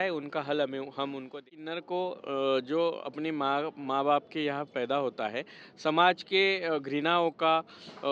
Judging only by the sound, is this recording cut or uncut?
cut